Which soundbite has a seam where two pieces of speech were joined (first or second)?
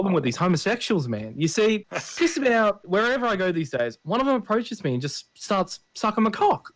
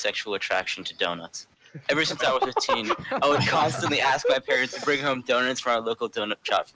first